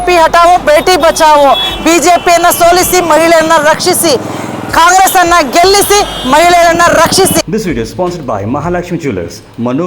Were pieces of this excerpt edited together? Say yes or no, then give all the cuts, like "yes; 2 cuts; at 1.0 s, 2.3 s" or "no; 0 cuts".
yes; 1 cut; at 7.4 s